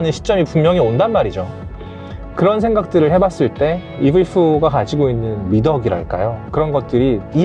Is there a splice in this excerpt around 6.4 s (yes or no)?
yes